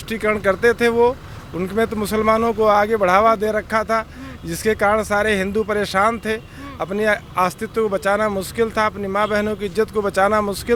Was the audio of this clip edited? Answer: no; 0 cuts

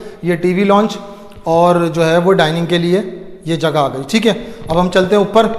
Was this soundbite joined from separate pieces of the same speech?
no; 0 cuts

